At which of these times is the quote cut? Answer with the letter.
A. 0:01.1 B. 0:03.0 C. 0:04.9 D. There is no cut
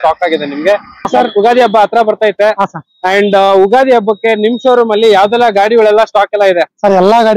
A